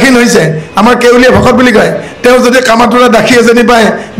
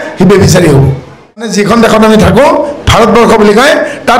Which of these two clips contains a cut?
second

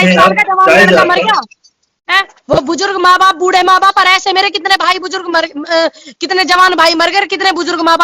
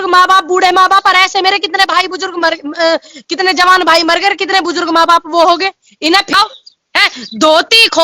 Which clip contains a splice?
second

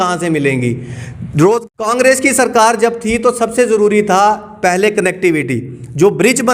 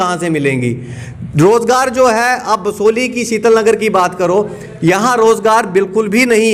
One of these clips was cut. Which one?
first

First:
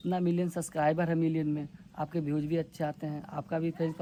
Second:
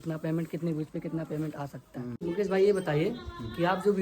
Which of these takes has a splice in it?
second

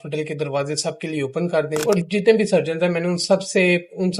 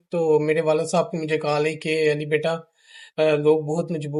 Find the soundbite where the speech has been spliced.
first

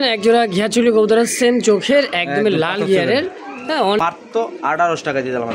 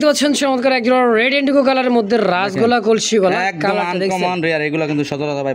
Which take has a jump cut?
first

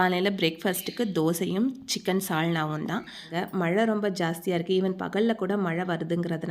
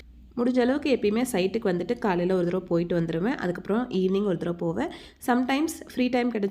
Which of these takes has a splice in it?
first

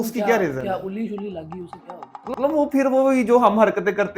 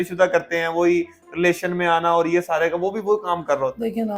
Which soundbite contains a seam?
first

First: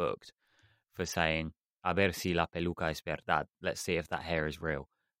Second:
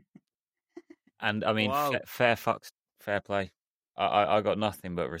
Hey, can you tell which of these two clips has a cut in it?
second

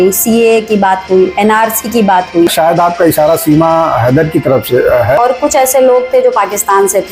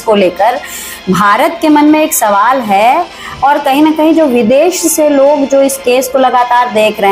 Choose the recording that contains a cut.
first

